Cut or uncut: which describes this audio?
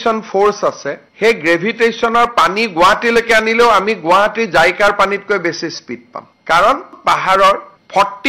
uncut